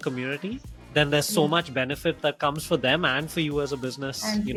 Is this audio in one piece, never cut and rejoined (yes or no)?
yes